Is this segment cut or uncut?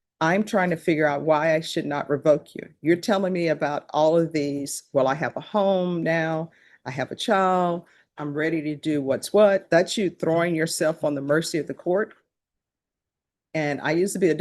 uncut